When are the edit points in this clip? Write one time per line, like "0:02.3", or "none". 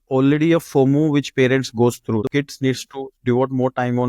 0:02.2